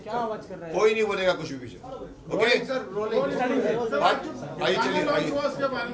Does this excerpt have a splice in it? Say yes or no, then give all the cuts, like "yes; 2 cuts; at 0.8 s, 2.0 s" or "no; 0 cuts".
no; 0 cuts